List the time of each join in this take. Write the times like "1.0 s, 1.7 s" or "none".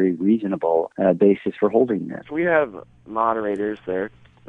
0.9 s, 2.3 s